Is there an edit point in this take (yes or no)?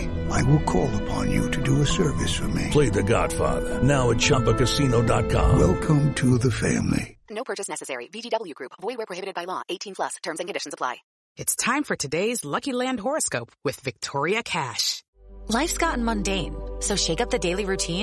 yes